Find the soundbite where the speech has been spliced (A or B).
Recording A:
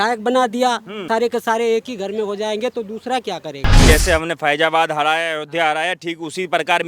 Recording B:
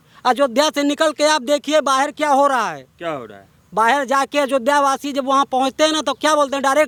A